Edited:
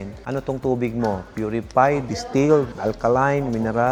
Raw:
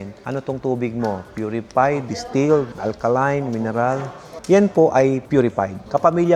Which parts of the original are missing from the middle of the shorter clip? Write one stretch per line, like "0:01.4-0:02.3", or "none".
none